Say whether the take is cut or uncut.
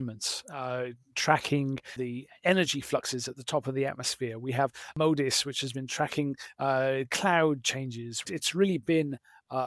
cut